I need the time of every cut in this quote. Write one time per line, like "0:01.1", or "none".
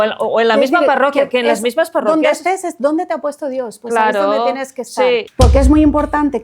0:05.3